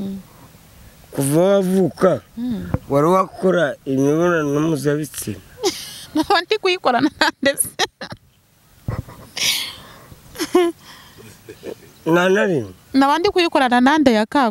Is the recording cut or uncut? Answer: uncut